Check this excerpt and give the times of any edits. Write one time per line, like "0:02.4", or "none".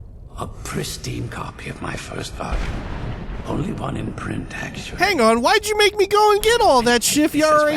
0:05.0